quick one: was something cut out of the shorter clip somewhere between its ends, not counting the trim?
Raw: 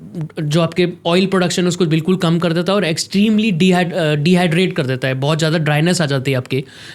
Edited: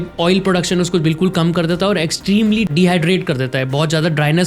yes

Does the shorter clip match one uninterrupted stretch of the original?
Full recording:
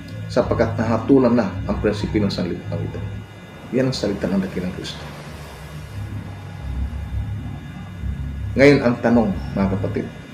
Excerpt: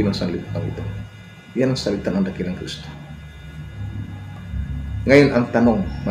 no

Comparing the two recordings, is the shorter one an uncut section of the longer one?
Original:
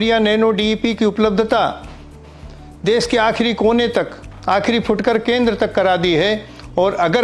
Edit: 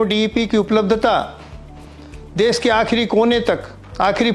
yes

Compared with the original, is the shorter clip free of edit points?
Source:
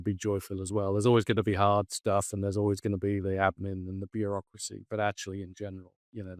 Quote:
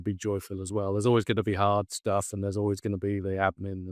yes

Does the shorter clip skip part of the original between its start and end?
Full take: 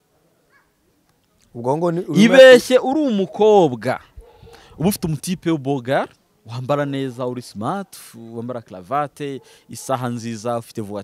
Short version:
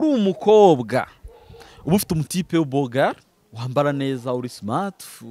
no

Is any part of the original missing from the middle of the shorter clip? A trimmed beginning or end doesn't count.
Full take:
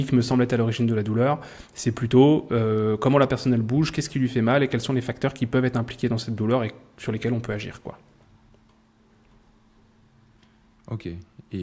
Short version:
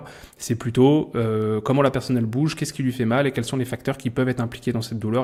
no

